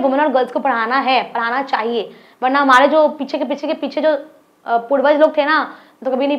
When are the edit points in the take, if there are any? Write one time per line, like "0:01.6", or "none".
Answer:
none